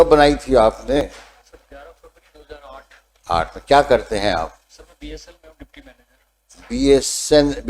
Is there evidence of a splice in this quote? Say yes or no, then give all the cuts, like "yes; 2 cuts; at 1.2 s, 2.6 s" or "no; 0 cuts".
yes; 1 cut; at 1.0 s